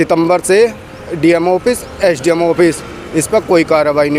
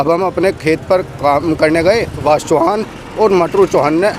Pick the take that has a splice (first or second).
second